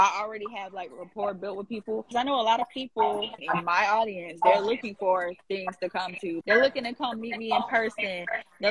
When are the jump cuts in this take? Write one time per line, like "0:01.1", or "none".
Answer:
0:02.1
0:03.3
0:06.4